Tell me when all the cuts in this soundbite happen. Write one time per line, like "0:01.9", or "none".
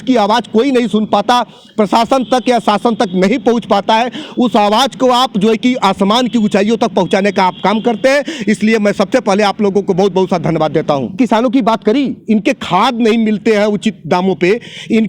0:11.1